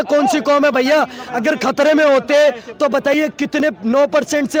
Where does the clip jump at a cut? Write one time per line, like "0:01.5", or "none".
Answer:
none